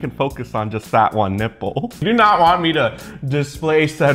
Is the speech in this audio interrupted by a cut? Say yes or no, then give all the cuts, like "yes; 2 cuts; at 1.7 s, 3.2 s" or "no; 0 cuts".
yes; 1 cut; at 2.0 s